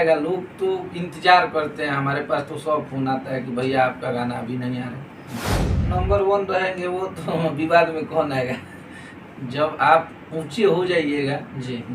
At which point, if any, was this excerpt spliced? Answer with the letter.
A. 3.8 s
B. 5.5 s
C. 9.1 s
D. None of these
B